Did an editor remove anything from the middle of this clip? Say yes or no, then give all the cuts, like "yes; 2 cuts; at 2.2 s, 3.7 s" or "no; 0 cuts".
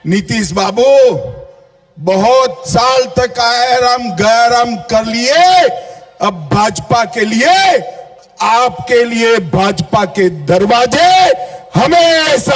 no; 0 cuts